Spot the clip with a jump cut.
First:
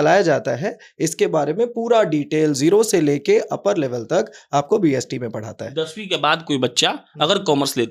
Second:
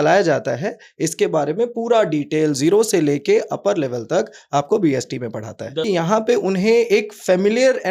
second; 1 cut; at 5.8 s

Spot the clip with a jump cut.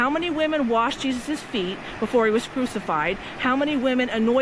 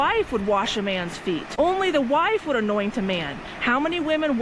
second; 1 cut; at 1.5 s

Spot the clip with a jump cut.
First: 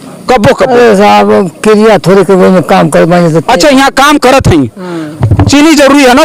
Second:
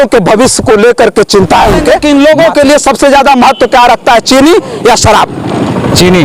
second; 1 cut; at 2.0 s

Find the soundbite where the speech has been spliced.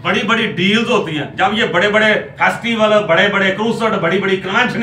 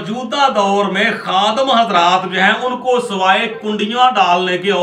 first; 1 cut; at 1.2 s

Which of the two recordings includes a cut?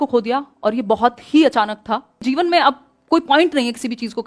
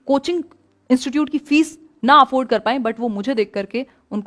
first; 1 cut; at 2.3 s

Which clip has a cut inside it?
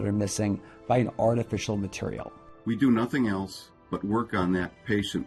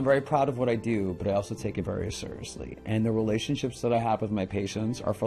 first; 1 cut; at 2.4 s

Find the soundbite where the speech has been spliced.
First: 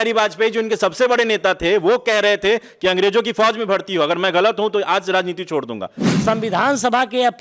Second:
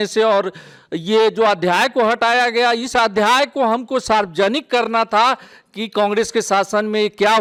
first; 1 cut; at 5.9 s

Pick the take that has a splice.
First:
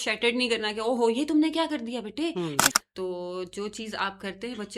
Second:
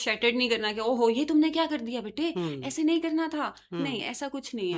first; 1 cut; at 2.7 s

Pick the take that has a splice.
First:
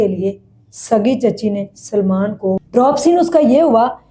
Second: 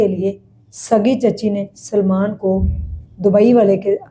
first; 1 cut; at 2.7 s

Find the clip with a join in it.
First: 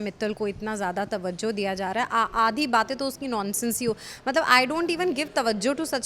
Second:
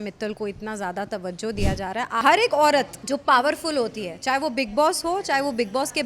second; 2 cuts; at 2.2 s, 3.0 s

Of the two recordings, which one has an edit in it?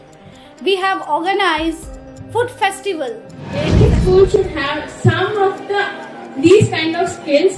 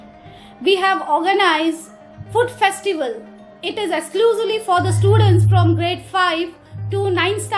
first; 1 cut; at 3.7 s

